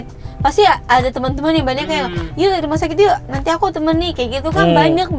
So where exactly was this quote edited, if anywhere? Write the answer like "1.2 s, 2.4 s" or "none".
none